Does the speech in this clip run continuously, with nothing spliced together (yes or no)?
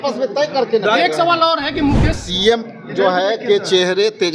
no